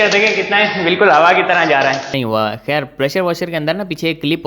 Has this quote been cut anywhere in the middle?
yes; 1 cut; at 2.1 s

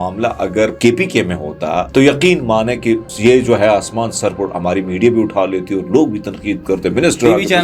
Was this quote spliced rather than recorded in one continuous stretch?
yes; 3 cuts; at 0.8 s, 1.9 s, 3.1 s

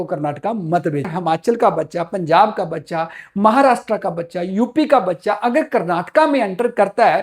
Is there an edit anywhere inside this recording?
yes; 1 cut; at 1.1 s

